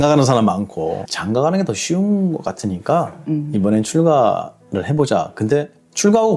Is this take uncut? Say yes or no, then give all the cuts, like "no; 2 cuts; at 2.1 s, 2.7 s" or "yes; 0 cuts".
no; 1 cut; at 1.1 s